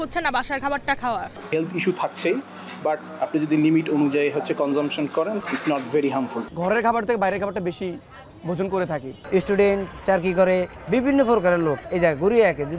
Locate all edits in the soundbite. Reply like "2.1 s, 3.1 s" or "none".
1.4 s, 3.1 s, 5.4 s, 6.4 s, 9.1 s, 10.8 s, 11.8 s